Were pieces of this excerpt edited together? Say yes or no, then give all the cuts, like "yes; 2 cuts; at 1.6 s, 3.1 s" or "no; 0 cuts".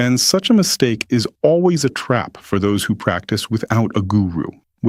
no; 0 cuts